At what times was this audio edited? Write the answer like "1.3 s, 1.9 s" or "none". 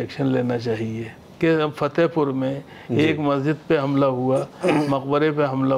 1.2 s